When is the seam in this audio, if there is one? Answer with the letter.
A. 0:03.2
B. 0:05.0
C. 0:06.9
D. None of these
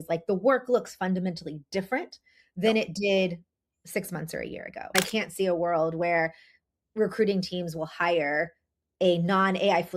B